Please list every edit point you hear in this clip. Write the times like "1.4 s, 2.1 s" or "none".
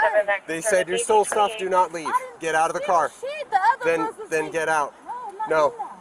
none

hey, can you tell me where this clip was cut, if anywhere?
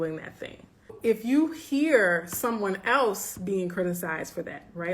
1.0 s

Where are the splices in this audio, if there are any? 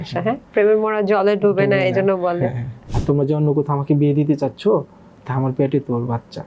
2.8 s

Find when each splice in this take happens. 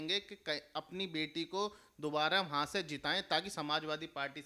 none

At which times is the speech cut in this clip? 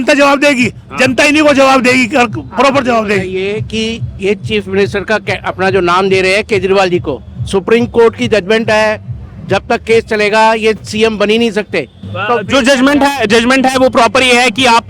none

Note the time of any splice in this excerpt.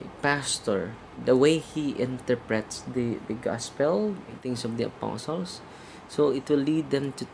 1.1 s, 4.4 s

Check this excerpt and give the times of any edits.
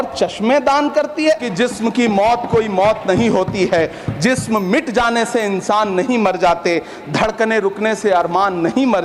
1.5 s

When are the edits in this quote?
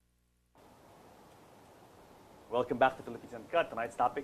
2.8 s

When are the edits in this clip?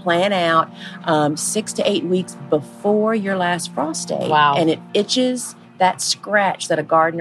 4.8 s

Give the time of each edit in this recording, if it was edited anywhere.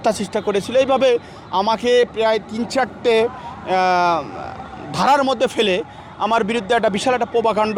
none

